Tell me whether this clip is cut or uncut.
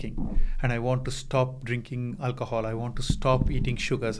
uncut